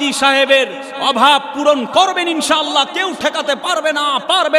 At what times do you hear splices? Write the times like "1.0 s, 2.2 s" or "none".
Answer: none